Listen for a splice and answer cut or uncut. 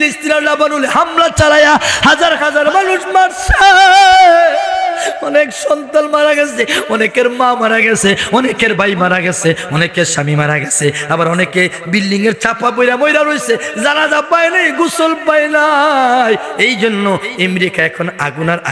uncut